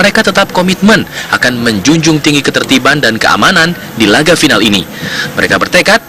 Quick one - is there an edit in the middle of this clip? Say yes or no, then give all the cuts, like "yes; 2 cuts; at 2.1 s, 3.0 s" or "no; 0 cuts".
no; 0 cuts